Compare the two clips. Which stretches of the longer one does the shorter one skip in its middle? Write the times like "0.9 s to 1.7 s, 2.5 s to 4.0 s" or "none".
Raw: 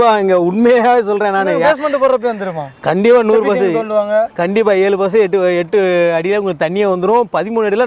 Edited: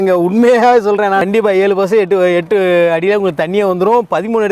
1.5 s to 4.5 s